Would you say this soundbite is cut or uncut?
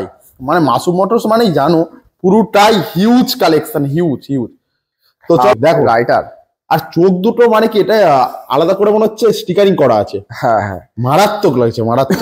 cut